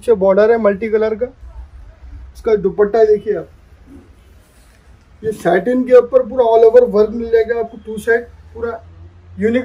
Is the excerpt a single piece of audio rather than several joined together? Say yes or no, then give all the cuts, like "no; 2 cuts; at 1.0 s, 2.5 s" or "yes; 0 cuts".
yes; 0 cuts